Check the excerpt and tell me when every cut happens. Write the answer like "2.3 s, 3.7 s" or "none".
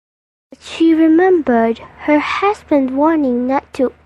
1.9 s

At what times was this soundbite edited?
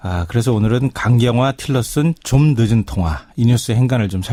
none

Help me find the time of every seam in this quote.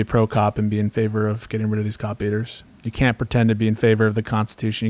none

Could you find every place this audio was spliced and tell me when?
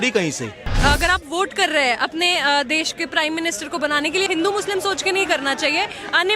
0.7 s, 4.3 s

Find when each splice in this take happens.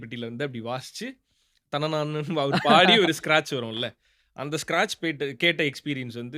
none

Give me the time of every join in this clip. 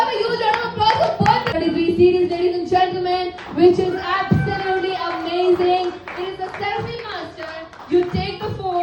1.5 s

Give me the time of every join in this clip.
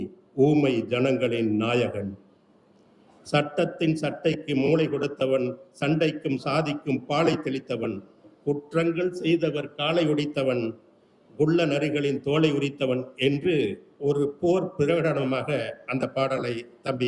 none

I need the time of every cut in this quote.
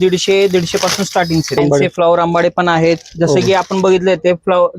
1.6 s

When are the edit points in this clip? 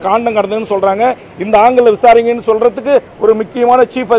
none

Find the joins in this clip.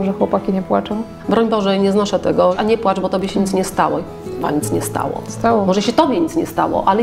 1.1 s, 2.6 s

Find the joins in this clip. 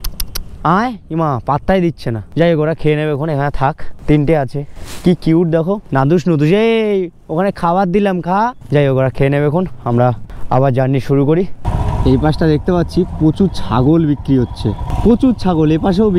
none

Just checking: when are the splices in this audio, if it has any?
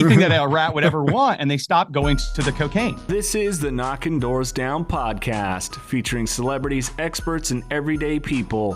3.0 s

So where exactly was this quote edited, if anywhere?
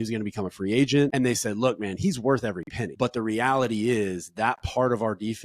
1.1 s, 2.8 s

